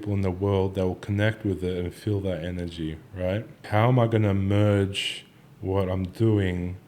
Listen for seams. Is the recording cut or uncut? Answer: cut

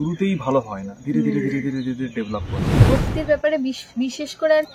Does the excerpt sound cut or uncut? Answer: cut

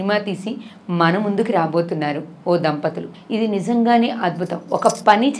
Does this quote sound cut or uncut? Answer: cut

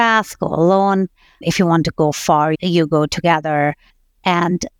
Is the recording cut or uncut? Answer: cut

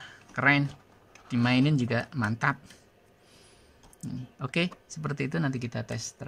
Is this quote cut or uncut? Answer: uncut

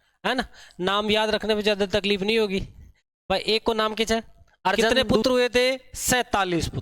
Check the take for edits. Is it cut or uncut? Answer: cut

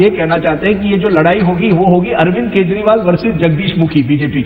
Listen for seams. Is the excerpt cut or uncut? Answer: uncut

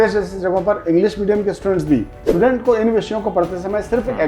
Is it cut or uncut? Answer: cut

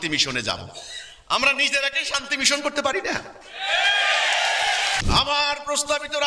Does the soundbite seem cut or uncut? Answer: cut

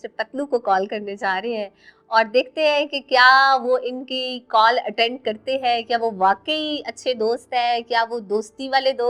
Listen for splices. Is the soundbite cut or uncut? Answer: uncut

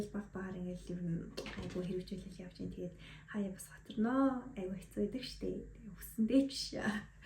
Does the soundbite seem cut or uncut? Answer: uncut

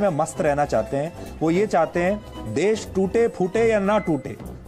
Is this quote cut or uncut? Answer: uncut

